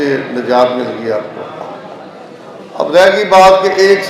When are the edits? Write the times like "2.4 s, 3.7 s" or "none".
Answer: none